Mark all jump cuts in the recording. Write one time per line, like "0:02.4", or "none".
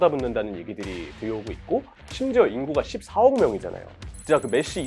0:01.9
0:03.9